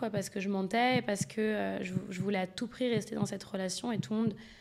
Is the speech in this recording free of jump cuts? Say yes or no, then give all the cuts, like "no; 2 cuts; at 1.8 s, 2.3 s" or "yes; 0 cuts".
yes; 0 cuts